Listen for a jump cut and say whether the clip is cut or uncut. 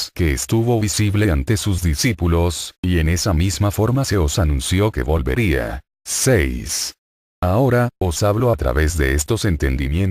cut